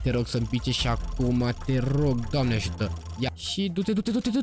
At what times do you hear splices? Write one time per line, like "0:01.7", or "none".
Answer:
0:03.1